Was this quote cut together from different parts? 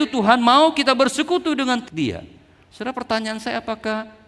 yes; 1 cut; at 1.9 s

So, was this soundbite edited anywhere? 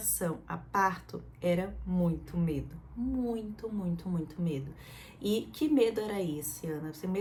no; 0 cuts

